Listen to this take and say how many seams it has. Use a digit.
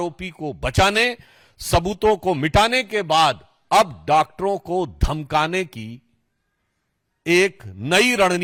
0